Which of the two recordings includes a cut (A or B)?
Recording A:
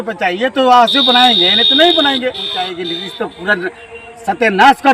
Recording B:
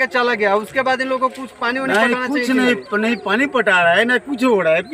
A